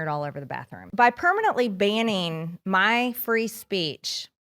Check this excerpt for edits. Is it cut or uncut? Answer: cut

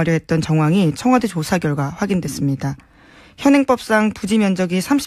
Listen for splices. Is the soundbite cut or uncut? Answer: uncut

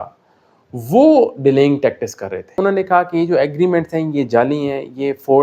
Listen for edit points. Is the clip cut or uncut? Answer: cut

